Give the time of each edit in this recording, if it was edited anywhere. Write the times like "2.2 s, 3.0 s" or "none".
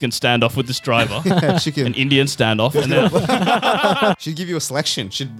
4.2 s